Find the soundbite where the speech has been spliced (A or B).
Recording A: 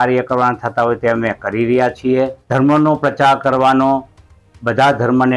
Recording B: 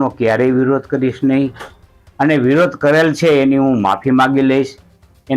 A